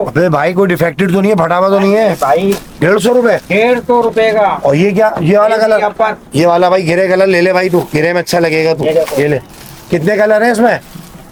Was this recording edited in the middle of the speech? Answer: no; 0 cuts

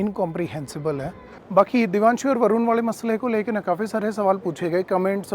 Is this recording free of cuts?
no; 1 cut; at 1.4 s

